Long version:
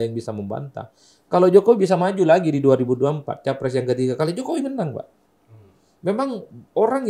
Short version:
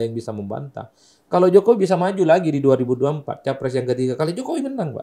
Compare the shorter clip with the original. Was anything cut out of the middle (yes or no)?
no